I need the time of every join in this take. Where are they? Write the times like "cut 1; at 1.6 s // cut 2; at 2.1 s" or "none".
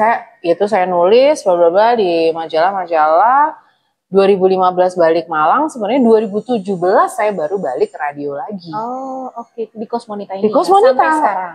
none